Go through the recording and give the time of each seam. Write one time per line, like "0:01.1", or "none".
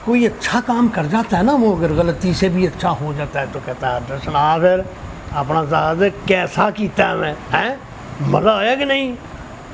none